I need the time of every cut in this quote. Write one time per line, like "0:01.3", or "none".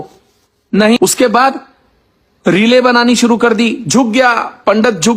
0:01.0